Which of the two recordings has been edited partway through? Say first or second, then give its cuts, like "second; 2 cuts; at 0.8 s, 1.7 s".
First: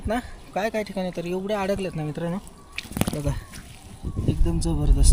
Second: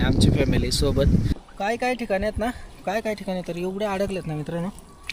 second; 1 cut; at 1.3 s